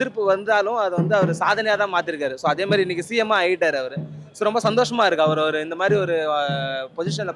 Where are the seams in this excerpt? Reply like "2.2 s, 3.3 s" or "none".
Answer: none